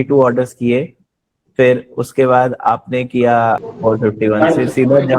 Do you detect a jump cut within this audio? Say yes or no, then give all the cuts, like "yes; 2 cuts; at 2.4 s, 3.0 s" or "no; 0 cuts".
yes; 1 cut; at 3.7 s